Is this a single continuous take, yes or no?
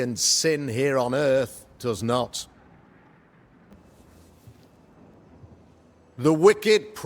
no